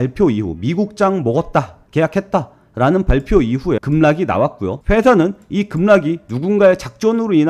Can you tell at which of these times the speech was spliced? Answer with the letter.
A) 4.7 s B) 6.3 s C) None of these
C